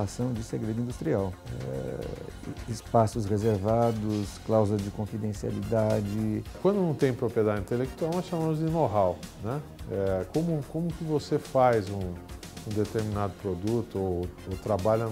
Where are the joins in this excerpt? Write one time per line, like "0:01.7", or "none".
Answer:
none